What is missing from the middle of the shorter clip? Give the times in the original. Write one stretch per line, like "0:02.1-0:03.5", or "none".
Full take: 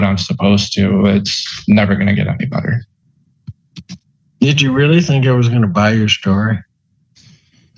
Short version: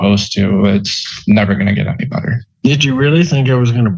0:02.8-0:04.2